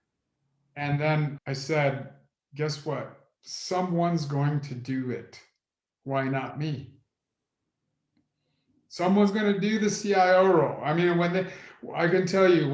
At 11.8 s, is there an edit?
no; 1 cut; at 1.3 s

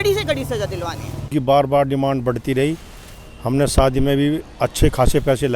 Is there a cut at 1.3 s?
yes; 1 cut; at 1.3 s

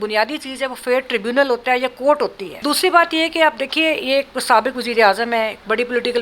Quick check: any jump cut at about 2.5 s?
yes; 1 cut; at 2.5 s

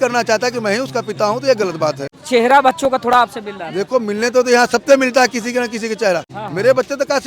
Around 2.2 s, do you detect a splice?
yes; 2 cuts; at 2.2 s, 6.4 s

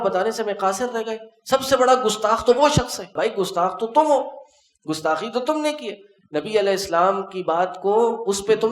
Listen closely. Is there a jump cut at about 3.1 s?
yes; 1 cut; at 3.1 s

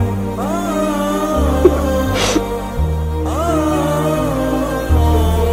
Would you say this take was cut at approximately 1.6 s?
no; 0 cuts

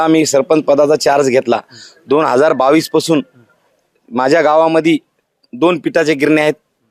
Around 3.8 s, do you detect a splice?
no; 0 cuts

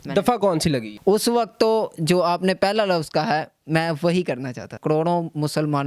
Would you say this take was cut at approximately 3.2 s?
no; 2 cuts; at 0.9 s, 4.8 s

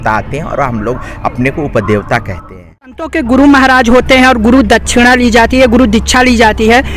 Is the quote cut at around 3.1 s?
yes; 1 cut; at 3.1 s

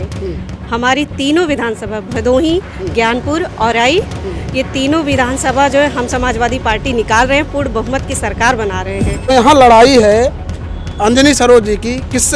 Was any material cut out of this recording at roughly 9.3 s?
yes; 1 cut; at 9.3 s

